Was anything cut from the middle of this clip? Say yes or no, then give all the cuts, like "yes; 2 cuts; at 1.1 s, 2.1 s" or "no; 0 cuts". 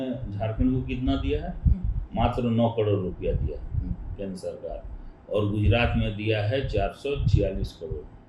no; 0 cuts